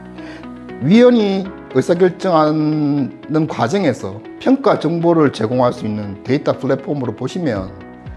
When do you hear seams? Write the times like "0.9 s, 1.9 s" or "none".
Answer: none